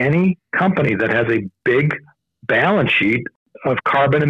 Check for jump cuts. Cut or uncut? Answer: cut